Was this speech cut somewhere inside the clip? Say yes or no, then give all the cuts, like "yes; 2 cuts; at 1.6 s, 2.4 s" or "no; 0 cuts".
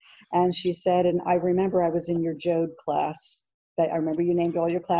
no; 0 cuts